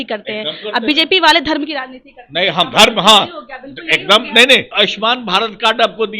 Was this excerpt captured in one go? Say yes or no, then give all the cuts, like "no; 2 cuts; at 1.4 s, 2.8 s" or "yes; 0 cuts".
no; 1 cut; at 4.7 s